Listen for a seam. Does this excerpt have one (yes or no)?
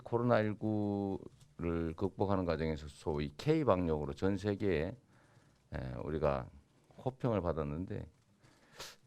no